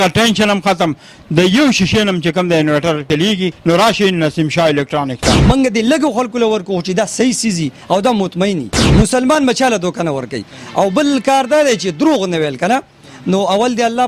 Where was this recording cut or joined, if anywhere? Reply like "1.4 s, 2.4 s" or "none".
3.3 s, 5.4 s, 8.8 s